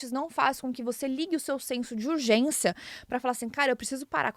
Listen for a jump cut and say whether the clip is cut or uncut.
uncut